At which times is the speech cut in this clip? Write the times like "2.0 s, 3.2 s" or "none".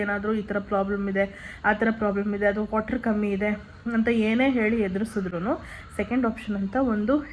none